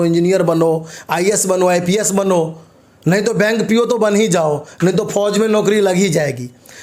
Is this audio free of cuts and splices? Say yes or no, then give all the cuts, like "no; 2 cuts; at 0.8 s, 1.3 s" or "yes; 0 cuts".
yes; 0 cuts